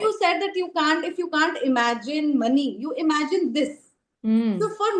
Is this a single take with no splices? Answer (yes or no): yes